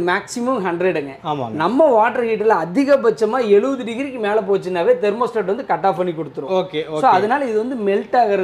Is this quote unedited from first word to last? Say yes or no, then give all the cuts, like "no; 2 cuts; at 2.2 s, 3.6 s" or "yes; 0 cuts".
yes; 0 cuts